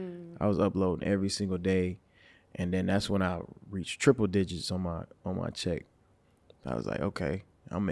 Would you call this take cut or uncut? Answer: uncut